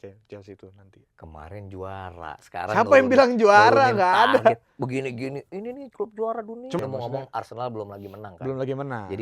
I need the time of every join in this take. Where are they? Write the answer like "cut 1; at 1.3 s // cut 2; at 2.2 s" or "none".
cut 1; at 6.8 s